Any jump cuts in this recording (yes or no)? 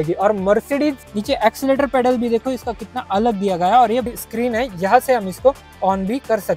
yes